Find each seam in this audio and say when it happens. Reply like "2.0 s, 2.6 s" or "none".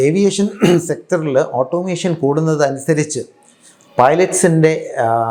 none